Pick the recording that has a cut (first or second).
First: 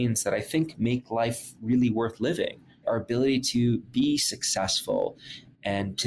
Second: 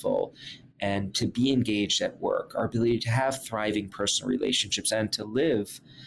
first